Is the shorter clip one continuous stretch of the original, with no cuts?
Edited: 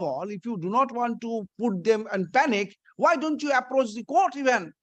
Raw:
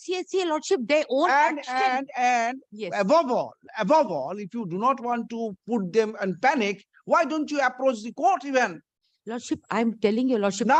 yes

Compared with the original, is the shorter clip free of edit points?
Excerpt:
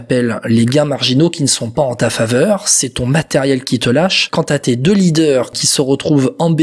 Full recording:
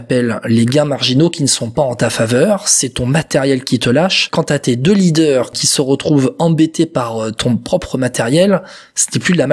yes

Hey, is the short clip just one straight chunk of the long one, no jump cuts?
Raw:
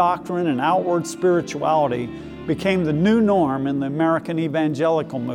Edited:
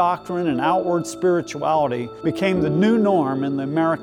no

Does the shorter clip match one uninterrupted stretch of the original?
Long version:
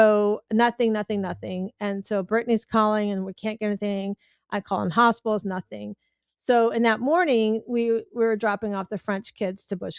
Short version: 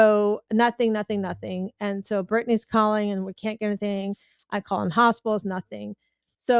yes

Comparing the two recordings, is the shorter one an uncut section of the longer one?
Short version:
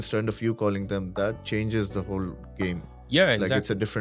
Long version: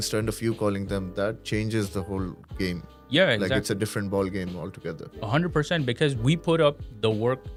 yes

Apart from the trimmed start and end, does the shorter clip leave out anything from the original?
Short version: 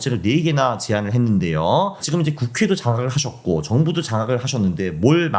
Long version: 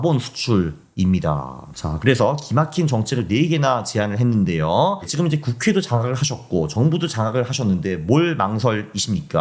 no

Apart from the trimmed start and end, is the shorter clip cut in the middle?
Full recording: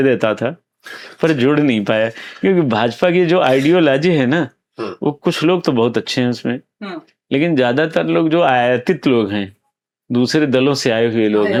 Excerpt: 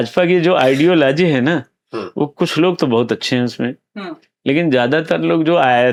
no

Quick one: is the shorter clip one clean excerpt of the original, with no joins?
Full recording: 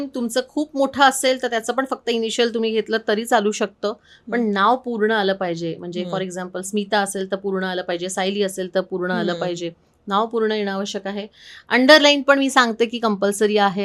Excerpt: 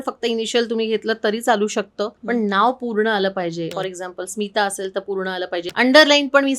no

